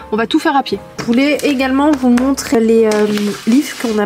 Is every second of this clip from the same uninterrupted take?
no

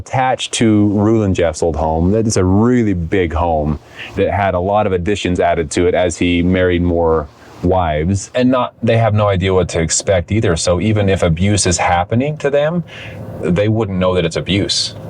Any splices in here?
yes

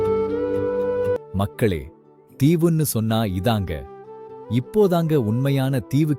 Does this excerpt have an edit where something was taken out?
yes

